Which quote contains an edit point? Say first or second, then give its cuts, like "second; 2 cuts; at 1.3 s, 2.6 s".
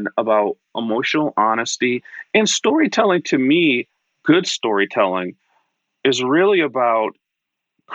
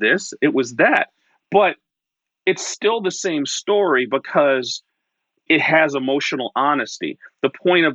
second; 1 cut; at 5.4 s